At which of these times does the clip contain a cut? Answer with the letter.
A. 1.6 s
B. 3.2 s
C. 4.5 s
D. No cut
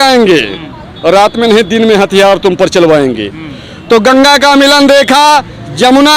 D